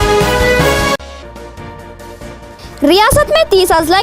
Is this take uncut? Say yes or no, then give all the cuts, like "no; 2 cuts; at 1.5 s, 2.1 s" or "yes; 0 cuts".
no; 1 cut; at 0.9 s